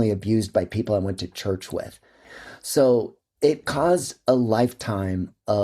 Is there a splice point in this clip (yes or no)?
yes